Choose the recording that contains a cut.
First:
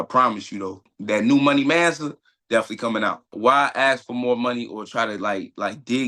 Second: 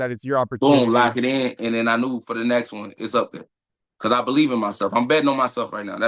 first; 2 cuts; at 0.9 s, 3.3 s

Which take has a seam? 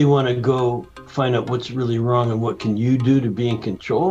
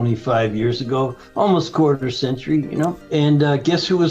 second; 1 cut; at 3.0 s

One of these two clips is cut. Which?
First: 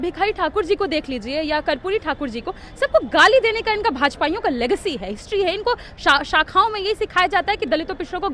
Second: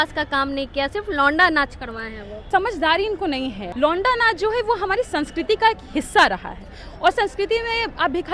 second; 2 cuts; at 2.3 s, 3.6 s

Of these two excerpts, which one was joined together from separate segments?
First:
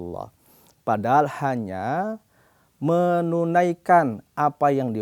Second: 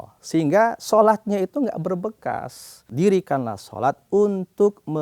second; 1 cut; at 2.9 s

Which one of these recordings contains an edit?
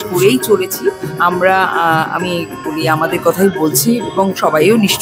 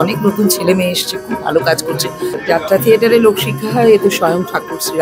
second; 1 cut; at 2.3 s

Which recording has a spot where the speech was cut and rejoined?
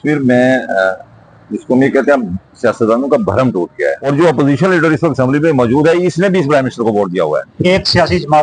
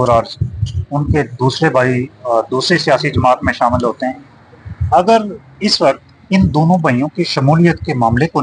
first; 2 cuts; at 4.0 s, 7.5 s

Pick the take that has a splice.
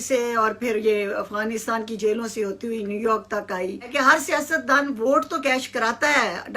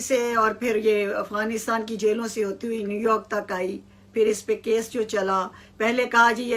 first; 1 cut; at 3.9 s

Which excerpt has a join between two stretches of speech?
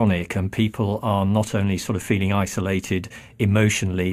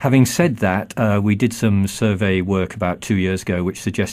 first; 1 cut; at 1.8 s

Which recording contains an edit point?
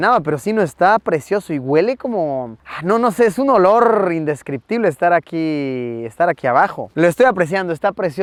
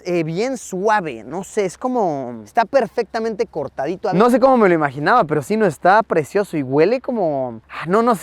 second; 1 cut; at 4.1 s

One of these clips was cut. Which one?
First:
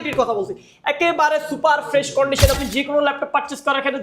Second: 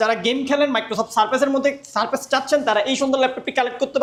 first; 1 cut; at 2.6 s

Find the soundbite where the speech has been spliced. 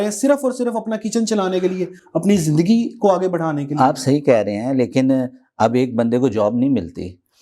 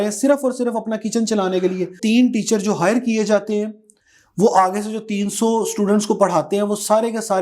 second; 1 cut; at 2.0 s

